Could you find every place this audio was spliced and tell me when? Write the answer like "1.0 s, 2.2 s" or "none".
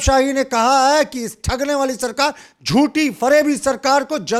none